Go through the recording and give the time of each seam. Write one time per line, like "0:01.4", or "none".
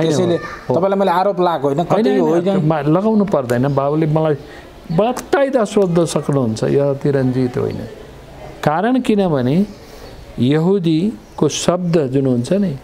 none